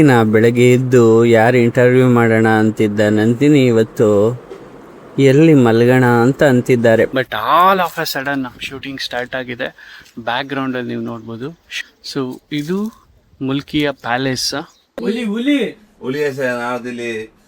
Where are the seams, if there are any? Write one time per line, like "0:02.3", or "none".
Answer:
0:07.2
0:11.7
0:15.0